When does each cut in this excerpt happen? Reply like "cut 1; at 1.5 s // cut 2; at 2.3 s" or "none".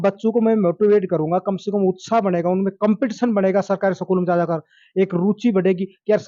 none